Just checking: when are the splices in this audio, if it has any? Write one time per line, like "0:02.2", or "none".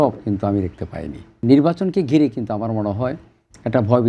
0:01.4